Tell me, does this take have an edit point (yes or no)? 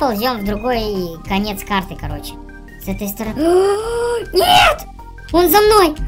no